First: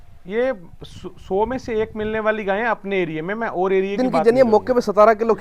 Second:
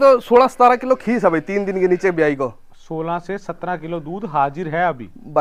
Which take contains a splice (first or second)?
first